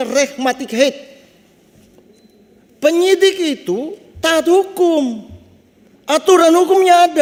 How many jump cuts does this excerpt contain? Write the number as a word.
zero